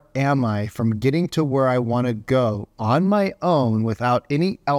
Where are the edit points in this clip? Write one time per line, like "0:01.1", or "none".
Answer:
none